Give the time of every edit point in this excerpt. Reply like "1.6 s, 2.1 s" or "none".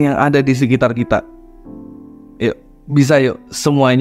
none